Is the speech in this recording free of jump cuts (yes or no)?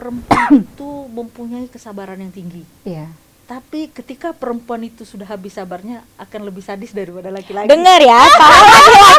yes